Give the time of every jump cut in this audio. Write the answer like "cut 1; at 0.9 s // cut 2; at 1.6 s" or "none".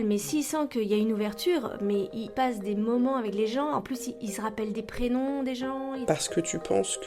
cut 1; at 6.0 s